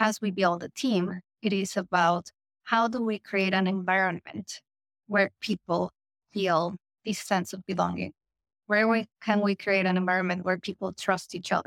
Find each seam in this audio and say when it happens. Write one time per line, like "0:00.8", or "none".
none